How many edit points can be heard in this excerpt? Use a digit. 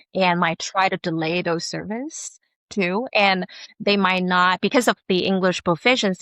0